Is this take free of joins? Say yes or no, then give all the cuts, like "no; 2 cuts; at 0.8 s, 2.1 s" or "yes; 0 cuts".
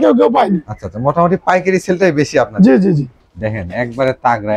no; 1 cut; at 3.1 s